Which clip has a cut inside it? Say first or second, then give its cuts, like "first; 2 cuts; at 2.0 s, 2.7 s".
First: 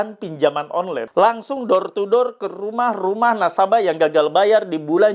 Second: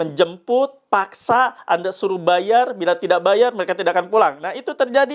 first; 1 cut; at 1.1 s